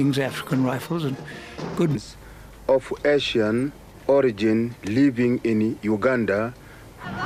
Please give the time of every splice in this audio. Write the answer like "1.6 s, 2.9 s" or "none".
none